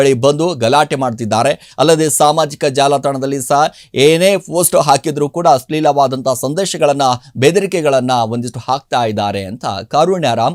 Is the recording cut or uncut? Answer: uncut